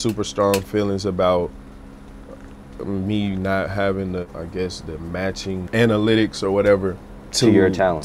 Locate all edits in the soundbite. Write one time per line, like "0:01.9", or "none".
0:04.2
0:05.7